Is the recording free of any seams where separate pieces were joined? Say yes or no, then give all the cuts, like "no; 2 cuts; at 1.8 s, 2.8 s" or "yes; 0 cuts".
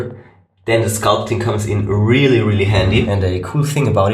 no; 1 cut; at 3.1 s